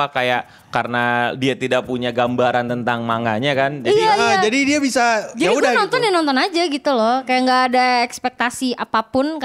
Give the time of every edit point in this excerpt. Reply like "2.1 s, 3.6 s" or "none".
none